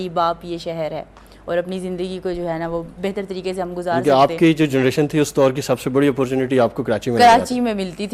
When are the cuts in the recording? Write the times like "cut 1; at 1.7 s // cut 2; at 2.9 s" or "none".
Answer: none